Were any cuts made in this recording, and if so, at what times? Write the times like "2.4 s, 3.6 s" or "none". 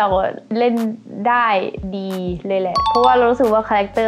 none

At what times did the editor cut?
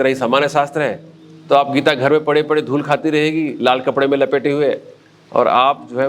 none

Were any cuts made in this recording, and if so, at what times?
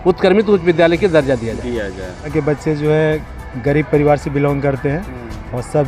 2.3 s

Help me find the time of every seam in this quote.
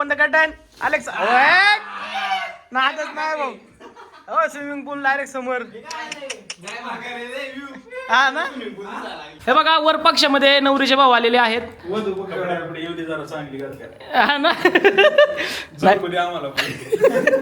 9.2 s

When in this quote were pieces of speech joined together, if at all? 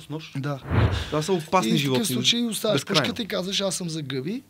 1.0 s

